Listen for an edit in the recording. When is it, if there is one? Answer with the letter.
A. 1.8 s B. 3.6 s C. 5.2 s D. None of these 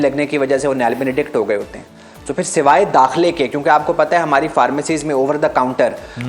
D